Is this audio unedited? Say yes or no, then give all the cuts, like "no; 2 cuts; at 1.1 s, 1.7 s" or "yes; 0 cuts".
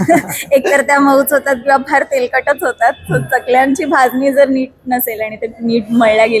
yes; 0 cuts